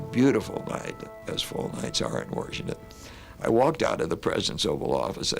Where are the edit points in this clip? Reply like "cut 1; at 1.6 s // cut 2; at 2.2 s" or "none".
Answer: cut 1; at 1.1 s